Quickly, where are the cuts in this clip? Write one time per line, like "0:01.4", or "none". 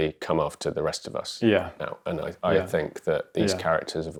none